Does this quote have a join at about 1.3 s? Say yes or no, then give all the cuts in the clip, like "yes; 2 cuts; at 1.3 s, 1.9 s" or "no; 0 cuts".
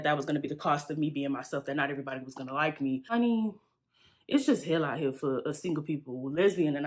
no; 1 cut; at 3.1 s